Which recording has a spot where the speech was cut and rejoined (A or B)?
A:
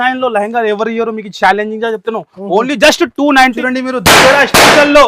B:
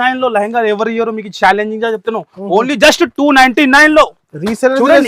A